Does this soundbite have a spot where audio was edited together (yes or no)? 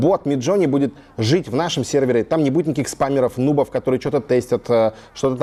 no